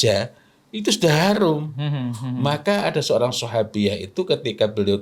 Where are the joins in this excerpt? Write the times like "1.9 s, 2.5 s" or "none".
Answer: none